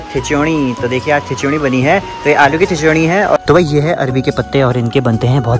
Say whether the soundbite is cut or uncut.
cut